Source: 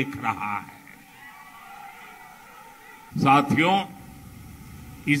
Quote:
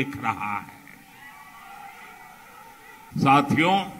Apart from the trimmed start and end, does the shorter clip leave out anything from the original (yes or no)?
no